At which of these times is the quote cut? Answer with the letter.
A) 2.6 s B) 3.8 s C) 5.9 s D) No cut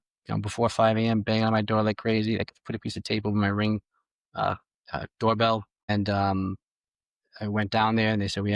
C